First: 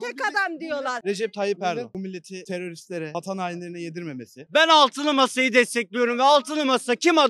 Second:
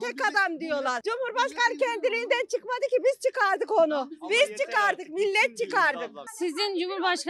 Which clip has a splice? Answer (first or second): first